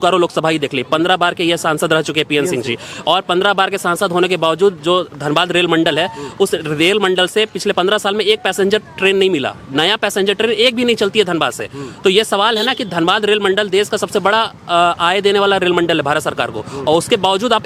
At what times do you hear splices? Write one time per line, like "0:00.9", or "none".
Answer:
none